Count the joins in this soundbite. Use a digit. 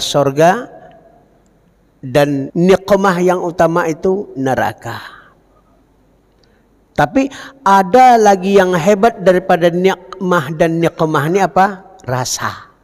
1